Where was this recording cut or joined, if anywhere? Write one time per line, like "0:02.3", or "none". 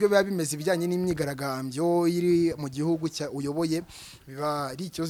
none